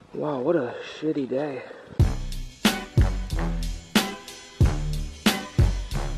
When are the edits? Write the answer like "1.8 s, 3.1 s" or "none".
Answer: 1.8 s